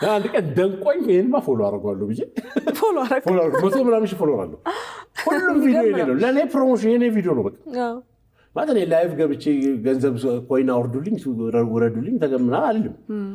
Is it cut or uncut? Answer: uncut